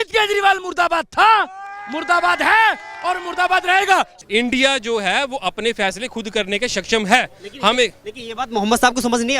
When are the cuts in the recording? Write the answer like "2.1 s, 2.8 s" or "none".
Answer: 4.1 s

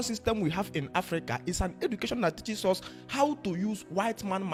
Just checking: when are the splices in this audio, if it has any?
none

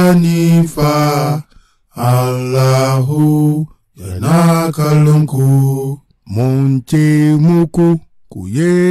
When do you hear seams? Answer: none

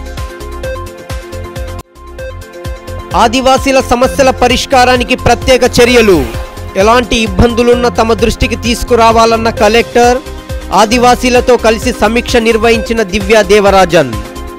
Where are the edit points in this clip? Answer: 1.4 s

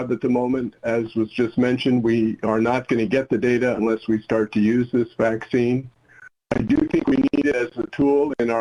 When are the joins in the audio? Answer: none

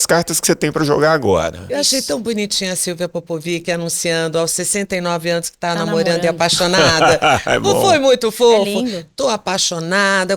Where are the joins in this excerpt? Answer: none

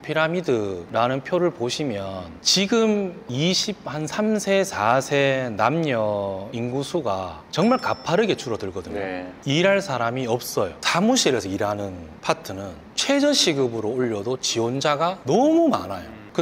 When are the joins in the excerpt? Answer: 10.7 s

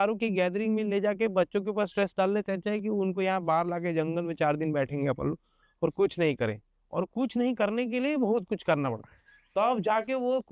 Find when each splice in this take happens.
none

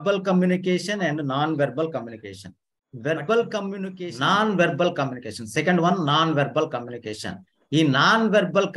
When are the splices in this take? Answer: 4.0 s

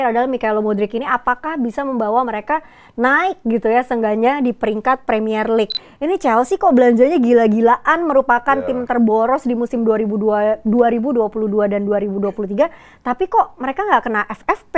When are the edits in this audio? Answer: 5.8 s

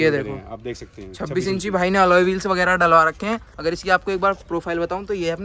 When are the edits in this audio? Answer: none

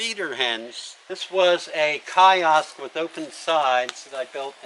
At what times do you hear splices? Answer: none

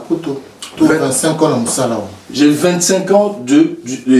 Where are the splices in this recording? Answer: 2.2 s

